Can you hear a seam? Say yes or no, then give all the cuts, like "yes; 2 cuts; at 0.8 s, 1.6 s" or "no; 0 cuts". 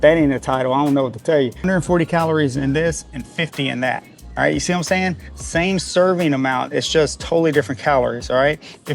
yes; 1 cut; at 1.6 s